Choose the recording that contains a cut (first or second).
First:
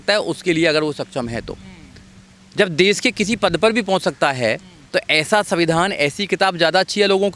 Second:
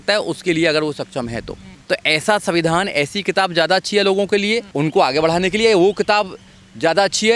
second